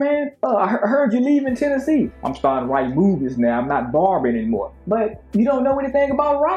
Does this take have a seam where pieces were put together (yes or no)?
yes